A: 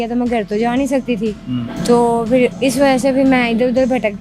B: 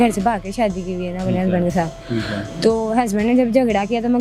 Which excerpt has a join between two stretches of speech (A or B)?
A